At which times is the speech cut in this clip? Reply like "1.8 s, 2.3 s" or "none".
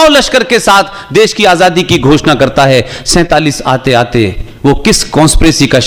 none